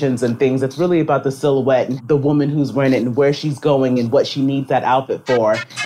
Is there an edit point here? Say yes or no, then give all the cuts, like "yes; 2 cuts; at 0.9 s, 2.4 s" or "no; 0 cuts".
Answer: yes; 1 cut; at 2.0 s